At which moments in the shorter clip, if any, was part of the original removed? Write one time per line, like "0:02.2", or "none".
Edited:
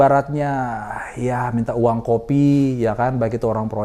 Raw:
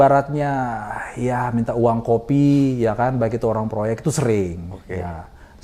none